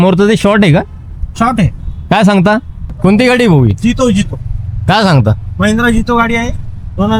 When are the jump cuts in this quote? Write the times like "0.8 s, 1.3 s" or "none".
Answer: 2.8 s